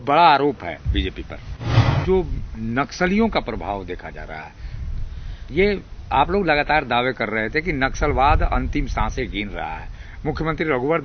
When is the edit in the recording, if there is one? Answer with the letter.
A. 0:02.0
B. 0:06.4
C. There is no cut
A